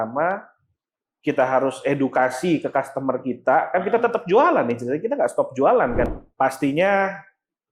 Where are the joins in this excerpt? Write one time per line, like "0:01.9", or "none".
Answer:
0:06.1